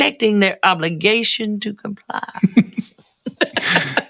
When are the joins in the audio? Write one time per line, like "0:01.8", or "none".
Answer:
0:02.3